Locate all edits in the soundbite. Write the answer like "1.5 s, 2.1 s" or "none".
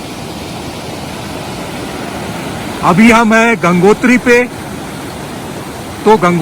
none